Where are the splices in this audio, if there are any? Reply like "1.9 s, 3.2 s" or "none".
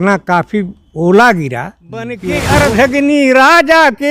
2.3 s